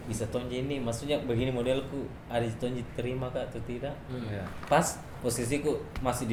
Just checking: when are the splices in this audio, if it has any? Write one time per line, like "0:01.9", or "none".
none